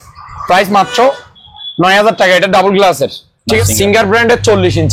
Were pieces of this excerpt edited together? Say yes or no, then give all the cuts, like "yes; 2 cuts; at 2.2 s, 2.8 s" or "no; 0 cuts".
yes; 1 cut; at 3.6 s